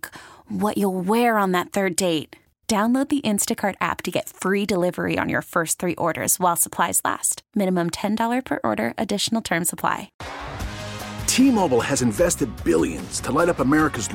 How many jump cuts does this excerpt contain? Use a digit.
1